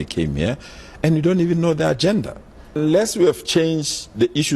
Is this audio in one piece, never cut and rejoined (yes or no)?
no